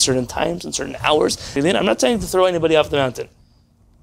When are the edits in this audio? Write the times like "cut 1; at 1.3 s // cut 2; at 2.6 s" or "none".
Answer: cut 1; at 1.5 s